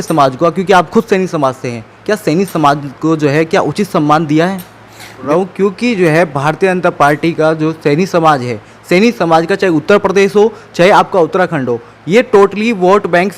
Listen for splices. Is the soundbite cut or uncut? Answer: cut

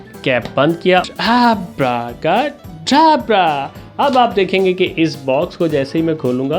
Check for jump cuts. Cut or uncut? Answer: cut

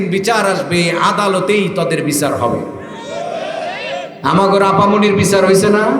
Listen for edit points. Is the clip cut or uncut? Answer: uncut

